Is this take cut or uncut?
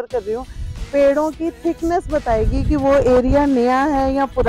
uncut